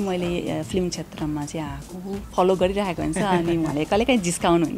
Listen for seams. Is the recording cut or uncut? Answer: cut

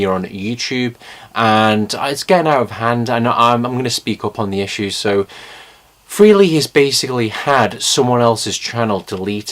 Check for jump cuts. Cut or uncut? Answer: cut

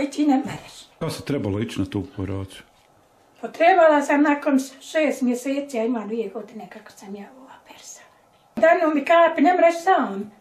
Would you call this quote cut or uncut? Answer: cut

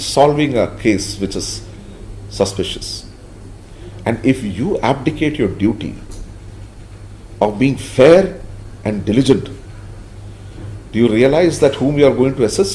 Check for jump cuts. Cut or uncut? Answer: uncut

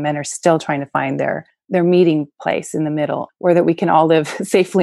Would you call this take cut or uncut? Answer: cut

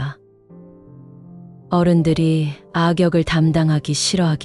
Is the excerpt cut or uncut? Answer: uncut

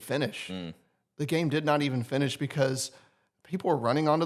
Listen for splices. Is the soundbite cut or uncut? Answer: uncut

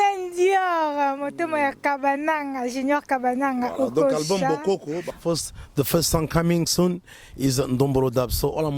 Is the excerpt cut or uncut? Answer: cut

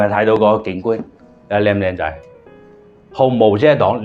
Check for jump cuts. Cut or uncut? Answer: uncut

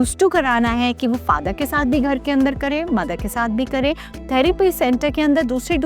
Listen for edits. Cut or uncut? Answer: uncut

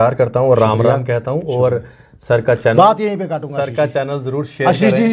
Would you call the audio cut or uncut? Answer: uncut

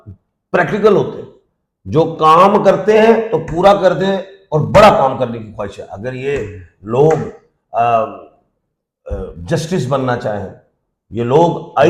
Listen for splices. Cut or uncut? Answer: uncut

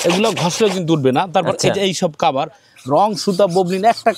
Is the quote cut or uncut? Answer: uncut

